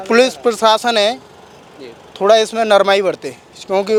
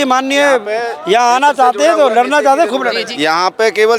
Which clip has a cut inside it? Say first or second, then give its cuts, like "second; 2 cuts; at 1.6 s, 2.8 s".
second; 1 cut; at 3.1 s